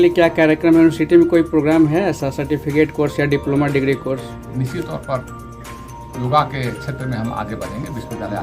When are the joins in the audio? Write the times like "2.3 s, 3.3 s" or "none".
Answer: 4.4 s